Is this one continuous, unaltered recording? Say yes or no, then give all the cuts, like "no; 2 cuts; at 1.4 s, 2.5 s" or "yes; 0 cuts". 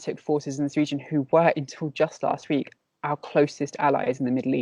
yes; 0 cuts